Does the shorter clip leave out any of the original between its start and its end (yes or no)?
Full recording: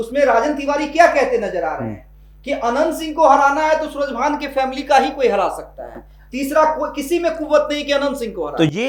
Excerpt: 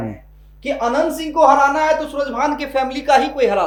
no